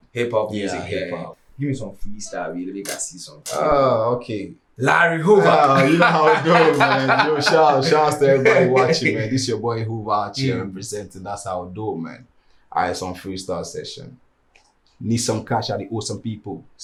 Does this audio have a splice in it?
no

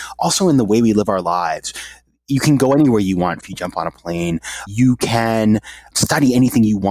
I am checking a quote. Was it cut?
yes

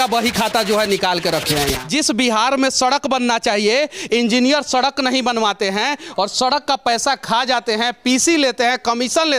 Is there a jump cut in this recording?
yes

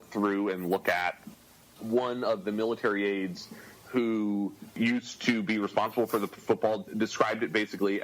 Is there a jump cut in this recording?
no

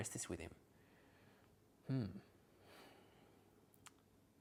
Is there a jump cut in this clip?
no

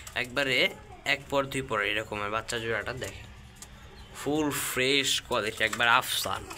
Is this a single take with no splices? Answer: yes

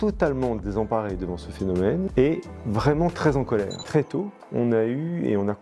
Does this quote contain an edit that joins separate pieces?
yes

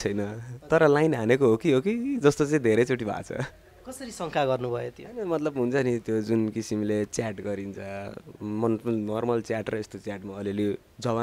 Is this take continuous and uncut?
yes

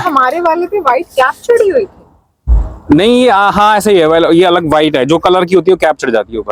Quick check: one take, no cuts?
yes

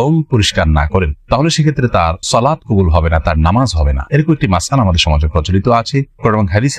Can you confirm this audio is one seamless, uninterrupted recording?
yes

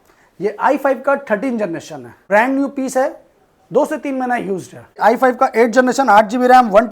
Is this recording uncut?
no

